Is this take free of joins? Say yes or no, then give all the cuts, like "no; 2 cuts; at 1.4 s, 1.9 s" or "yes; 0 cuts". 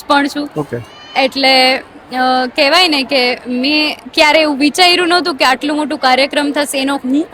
yes; 0 cuts